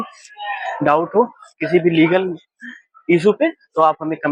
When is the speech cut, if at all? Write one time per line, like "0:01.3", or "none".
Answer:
none